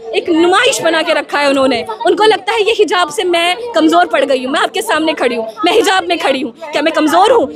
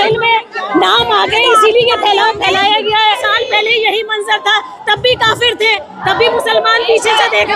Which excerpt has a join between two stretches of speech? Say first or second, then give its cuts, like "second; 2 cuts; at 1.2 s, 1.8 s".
second; 1 cut; at 3.0 s